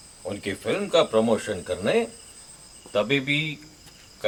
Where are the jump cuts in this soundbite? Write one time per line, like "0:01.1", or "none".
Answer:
none